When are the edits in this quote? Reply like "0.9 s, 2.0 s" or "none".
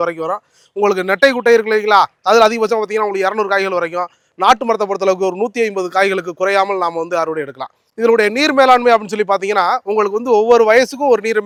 none